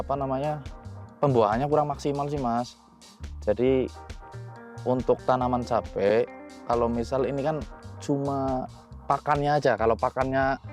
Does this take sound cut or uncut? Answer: uncut